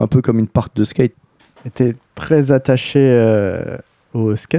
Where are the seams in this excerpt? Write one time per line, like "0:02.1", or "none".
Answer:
none